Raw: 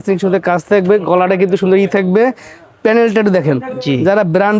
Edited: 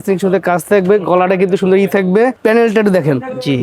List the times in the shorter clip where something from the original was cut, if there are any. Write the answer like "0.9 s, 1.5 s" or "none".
2.4 s